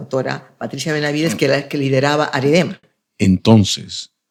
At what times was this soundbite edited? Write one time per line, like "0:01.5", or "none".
none